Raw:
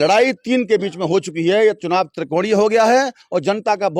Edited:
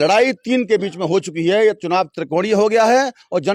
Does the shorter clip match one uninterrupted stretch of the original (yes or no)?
yes